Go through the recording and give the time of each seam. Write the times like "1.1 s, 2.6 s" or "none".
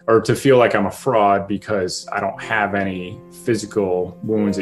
none

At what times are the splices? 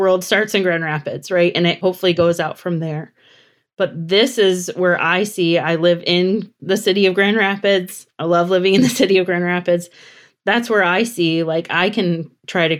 1.8 s

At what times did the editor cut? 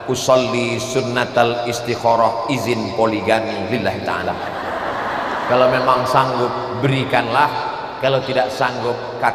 none

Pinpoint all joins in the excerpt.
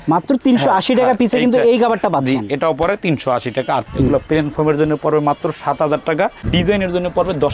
3.9 s

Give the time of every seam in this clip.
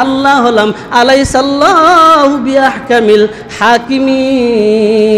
none

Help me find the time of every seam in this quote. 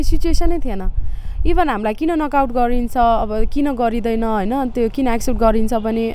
none

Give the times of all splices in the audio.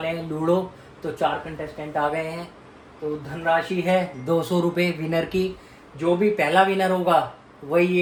none

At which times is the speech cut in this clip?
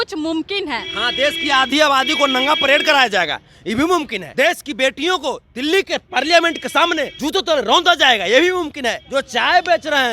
4.2 s, 7.1 s, 9.0 s

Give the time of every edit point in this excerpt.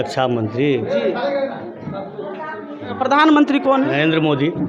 2.9 s

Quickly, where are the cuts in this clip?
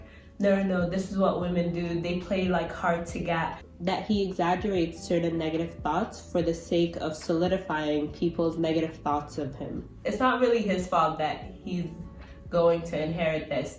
3.6 s, 9.9 s

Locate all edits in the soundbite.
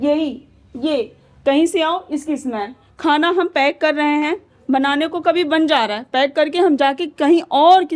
none

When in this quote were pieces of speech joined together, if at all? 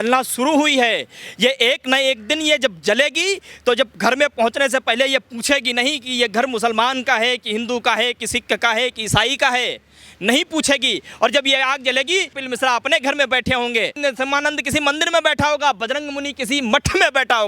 13.9 s

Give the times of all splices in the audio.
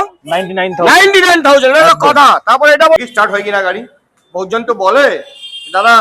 3.0 s

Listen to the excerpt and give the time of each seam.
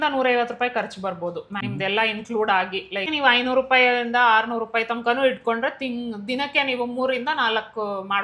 1.5 s, 3.1 s

